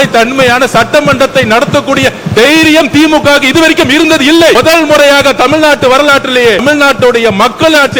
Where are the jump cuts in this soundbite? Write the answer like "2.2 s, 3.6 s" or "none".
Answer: 4.6 s, 6.6 s

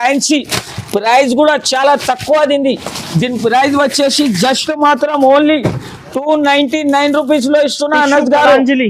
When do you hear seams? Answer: none

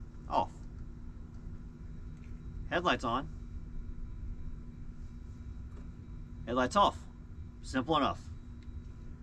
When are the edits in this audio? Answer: none

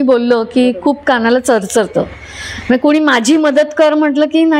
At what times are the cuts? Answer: none

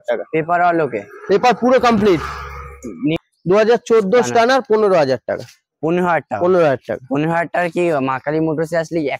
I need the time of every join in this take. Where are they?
3.2 s

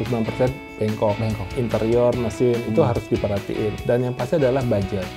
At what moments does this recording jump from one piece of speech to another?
1.5 s

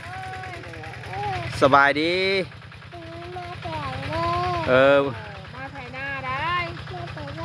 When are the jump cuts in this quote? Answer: none

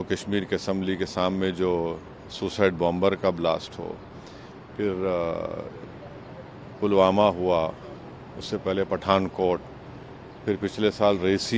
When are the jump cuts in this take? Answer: none

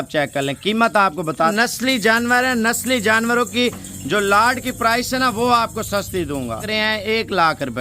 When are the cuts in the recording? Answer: 1.5 s, 6.7 s

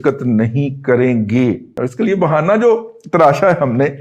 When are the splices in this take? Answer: 1.8 s

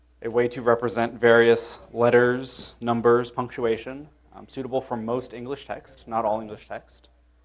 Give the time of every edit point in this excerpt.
none

